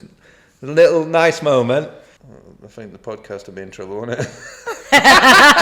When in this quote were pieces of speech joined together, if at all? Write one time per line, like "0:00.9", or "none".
0:02.0